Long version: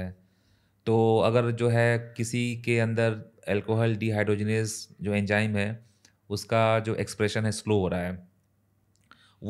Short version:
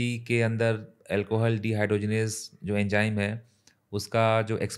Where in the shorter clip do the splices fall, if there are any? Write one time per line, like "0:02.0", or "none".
none